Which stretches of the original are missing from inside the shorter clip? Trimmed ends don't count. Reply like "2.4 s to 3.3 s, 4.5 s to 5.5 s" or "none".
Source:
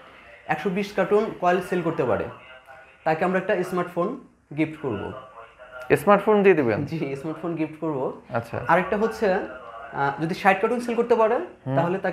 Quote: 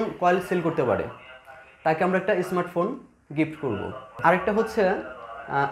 5.3 s to 8.5 s